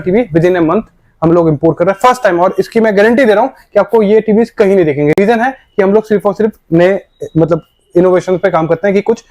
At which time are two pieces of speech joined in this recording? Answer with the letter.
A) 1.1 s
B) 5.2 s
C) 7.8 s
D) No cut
D